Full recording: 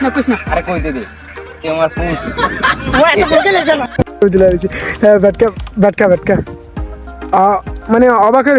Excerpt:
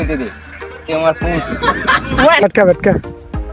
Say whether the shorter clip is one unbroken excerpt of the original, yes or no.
no